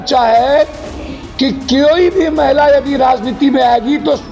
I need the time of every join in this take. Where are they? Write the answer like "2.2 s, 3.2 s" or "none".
none